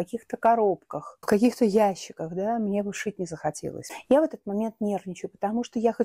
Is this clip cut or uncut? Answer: cut